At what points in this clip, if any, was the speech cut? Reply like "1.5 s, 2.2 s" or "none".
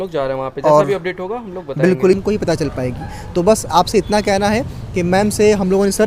2.2 s